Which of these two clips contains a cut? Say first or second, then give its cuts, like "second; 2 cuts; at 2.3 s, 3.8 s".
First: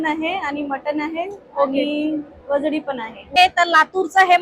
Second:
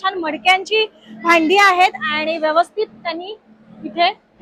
first; 1 cut; at 3.2 s